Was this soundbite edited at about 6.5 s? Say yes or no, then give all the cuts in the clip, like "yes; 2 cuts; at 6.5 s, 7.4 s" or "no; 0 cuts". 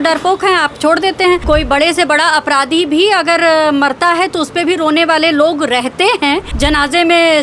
yes; 2 cuts; at 1.4 s, 6.5 s